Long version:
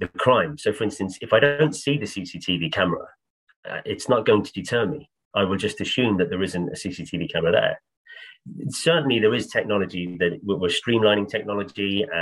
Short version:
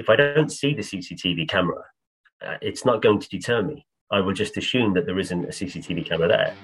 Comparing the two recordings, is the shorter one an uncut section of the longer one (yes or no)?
yes